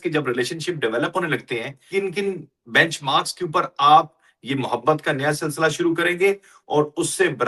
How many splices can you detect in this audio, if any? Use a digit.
1